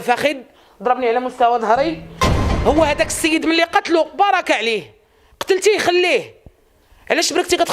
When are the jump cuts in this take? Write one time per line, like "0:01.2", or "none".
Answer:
0:02.2